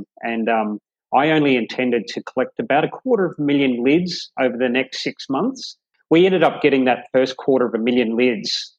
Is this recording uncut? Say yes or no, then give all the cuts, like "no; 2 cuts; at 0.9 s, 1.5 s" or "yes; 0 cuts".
no; 1 cut; at 5.9 s